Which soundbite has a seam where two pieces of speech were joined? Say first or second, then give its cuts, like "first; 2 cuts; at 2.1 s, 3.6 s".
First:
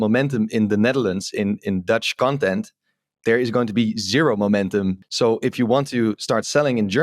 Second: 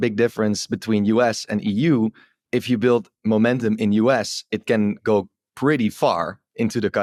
first; 2 cuts; at 2.1 s, 5.1 s